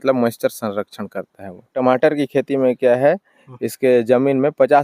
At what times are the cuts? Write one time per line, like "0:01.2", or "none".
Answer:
0:01.7